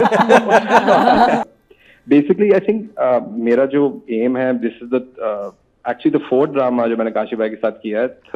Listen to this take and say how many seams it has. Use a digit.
1